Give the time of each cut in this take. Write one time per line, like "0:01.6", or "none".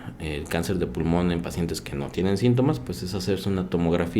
none